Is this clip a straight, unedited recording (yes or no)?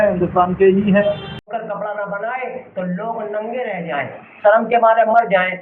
no